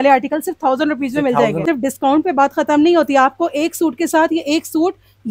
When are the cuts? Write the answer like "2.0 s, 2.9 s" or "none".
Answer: 1.6 s